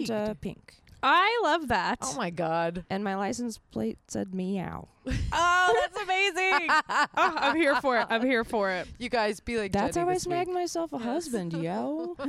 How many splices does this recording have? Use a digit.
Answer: 0